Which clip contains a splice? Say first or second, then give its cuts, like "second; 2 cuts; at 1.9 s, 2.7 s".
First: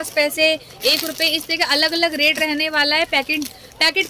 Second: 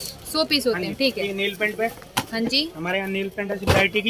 second; 1 cut; at 1.2 s